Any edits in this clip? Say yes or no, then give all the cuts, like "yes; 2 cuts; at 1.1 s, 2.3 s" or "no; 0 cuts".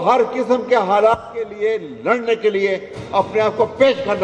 no; 0 cuts